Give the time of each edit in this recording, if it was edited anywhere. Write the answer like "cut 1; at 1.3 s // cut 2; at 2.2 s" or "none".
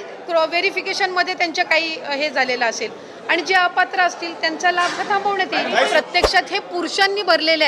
cut 1; at 5.9 s